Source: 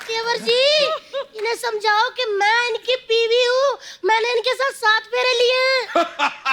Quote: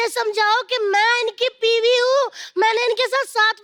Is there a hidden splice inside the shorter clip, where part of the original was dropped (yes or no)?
no